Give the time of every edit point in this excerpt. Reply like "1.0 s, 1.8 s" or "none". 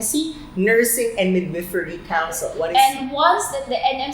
2.6 s

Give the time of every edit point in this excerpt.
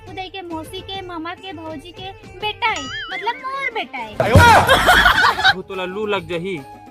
5.6 s

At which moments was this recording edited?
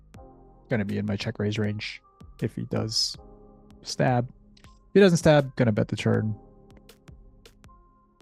none

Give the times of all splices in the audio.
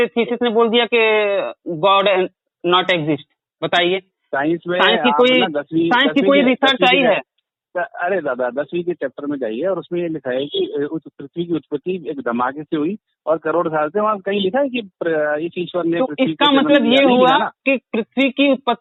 none

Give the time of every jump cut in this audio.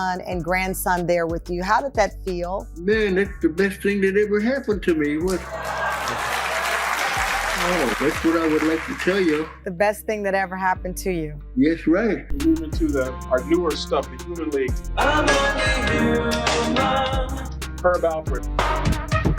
12.3 s

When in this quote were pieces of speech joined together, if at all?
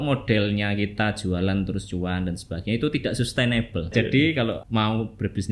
3.9 s

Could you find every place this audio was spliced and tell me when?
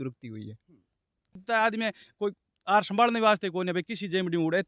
1.4 s

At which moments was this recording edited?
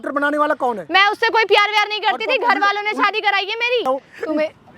3.8 s

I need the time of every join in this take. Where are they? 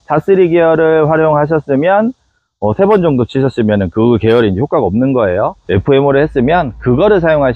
none

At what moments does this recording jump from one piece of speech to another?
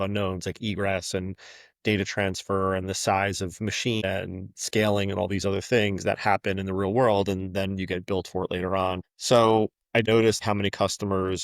4.0 s, 9.1 s, 10.2 s

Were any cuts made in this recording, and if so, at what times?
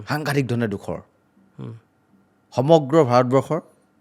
none

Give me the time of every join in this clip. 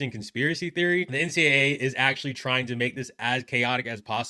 1.1 s

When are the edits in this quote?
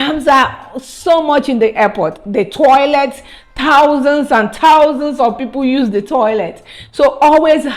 none

